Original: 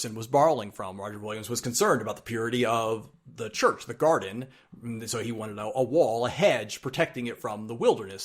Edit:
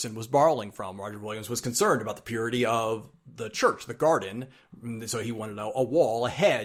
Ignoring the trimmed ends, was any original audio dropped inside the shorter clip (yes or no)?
no